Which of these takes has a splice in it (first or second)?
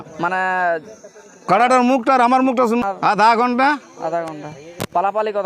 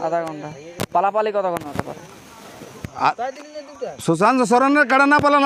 first